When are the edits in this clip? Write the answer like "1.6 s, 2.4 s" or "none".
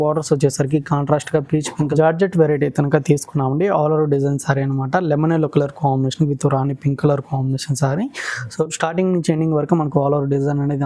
1.9 s